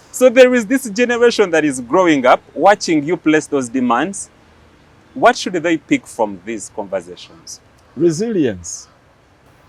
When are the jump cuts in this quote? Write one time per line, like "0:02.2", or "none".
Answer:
none